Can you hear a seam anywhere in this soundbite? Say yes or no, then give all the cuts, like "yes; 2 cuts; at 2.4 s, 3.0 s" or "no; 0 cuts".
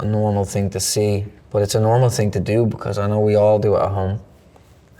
yes; 1 cut; at 1.4 s